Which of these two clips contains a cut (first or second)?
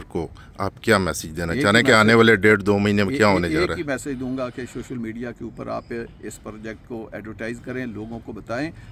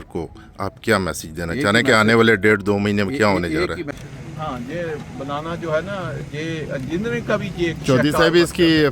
second